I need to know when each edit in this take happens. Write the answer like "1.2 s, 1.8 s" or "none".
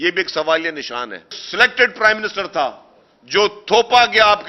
1.4 s